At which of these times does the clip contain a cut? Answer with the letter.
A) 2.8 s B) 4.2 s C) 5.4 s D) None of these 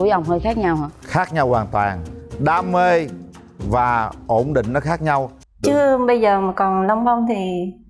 C